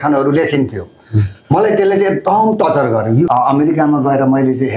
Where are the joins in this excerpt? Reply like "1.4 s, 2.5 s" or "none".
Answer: 3.3 s